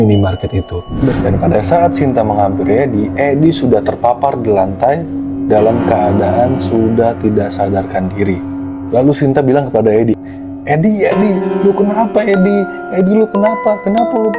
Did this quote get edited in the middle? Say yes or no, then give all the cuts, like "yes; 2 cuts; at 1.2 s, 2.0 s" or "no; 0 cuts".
yes; 1 cut; at 1.1 s